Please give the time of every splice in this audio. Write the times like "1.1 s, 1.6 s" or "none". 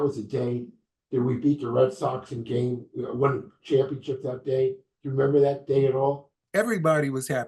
6.4 s